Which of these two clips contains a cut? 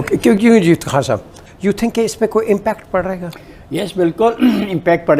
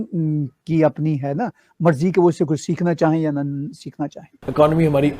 second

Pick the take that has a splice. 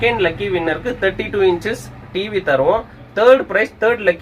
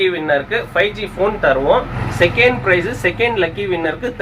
second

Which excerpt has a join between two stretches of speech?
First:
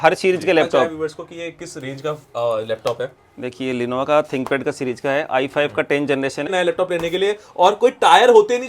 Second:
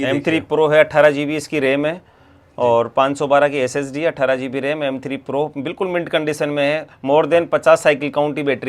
first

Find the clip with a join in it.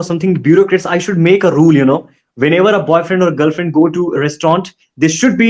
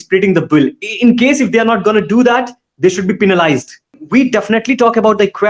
second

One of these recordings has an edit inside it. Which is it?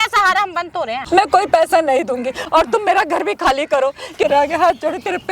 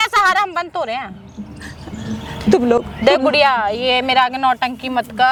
first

